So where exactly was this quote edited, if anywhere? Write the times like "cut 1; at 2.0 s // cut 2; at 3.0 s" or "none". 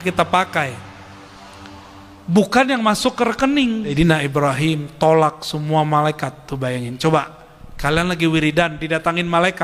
cut 1; at 3.9 s

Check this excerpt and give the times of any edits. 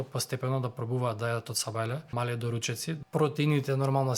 cut 1; at 2.1 s // cut 2; at 3.0 s

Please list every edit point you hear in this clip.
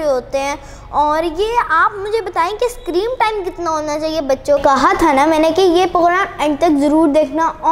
cut 1; at 4.6 s

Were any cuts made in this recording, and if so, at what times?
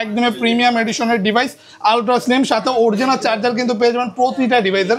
none

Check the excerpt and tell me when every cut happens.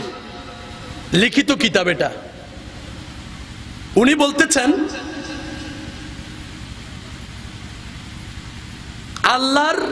none

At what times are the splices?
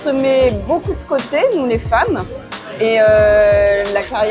none

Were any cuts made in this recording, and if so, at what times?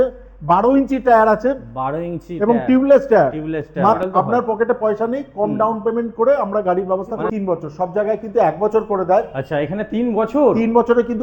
cut 1; at 4.0 s // cut 2; at 7.3 s

